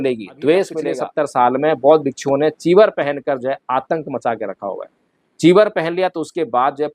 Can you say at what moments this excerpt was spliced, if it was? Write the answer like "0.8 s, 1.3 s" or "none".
1.0 s